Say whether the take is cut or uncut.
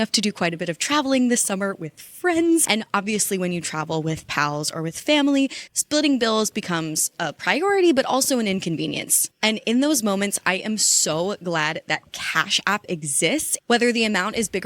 cut